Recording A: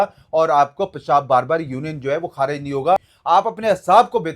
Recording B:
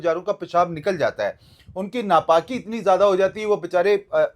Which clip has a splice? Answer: A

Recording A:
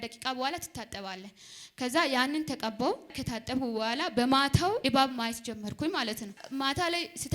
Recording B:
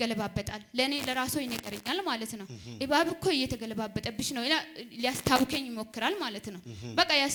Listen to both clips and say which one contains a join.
A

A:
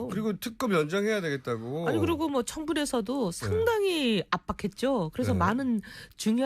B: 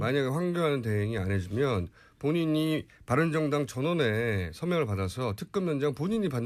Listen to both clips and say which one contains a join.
A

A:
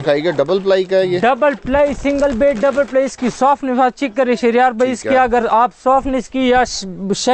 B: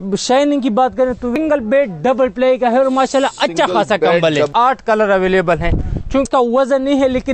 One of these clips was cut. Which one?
B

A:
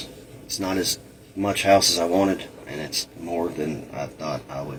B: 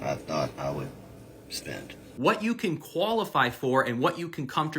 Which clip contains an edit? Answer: B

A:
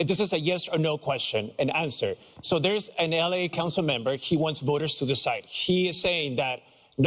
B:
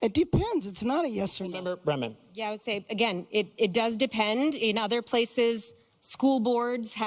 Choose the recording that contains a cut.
B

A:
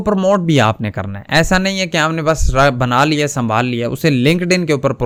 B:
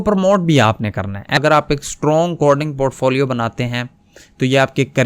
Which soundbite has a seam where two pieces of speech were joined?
B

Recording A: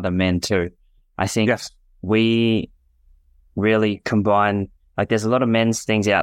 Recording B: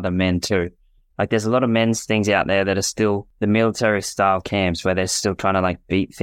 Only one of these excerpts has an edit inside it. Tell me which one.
B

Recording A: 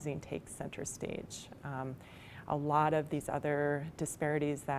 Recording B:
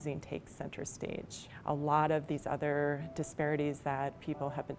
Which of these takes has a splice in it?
B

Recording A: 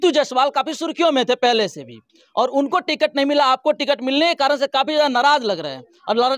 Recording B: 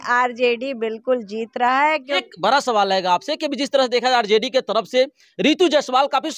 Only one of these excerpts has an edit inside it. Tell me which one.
B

